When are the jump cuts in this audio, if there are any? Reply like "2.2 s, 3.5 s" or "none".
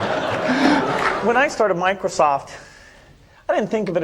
1.0 s